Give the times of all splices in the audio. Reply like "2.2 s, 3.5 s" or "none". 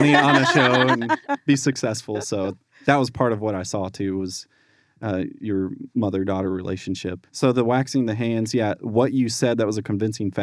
7.2 s